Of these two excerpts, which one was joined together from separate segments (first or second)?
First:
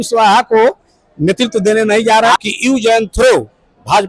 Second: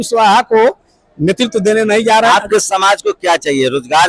first